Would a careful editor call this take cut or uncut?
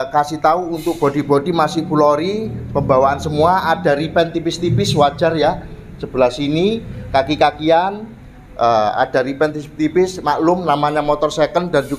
uncut